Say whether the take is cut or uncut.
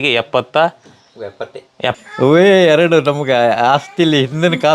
cut